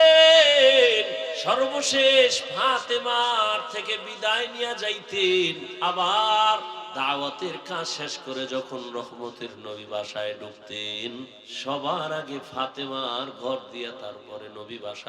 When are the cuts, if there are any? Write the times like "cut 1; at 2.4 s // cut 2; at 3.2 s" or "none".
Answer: cut 1; at 1.3 s // cut 2; at 5.7 s // cut 3; at 6.9 s // cut 4; at 11.4 s